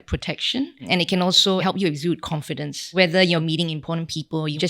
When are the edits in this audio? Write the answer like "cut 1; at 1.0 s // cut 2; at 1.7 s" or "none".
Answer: cut 1; at 0.8 s // cut 2; at 2.7 s // cut 3; at 3.4 s